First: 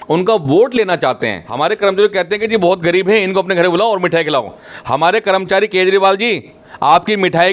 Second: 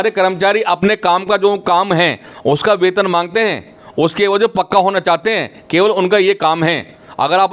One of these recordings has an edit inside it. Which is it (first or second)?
first